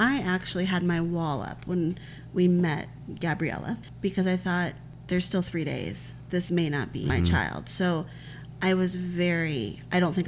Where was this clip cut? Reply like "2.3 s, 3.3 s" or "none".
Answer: 3.8 s, 4.9 s, 7.1 s